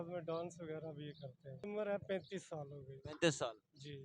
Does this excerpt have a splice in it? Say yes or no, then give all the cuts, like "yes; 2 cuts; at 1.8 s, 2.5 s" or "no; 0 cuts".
yes; 1 cut; at 1.7 s